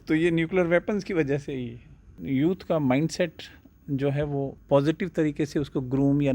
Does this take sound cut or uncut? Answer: cut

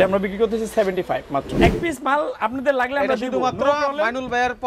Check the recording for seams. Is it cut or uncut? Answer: cut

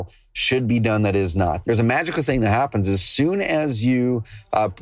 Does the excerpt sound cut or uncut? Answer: cut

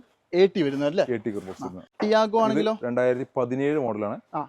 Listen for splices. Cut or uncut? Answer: cut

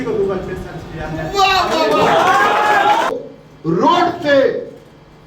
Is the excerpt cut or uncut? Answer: cut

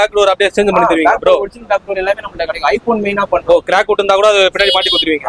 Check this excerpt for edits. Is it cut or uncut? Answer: uncut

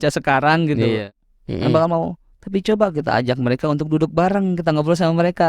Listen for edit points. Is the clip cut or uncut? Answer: cut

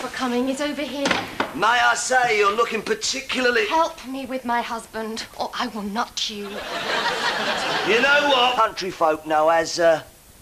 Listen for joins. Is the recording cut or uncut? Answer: uncut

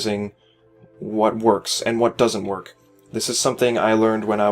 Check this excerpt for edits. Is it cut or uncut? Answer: cut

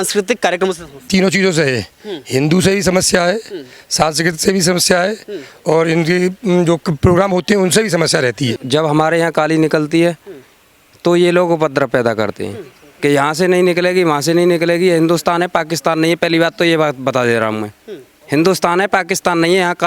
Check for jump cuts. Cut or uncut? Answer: cut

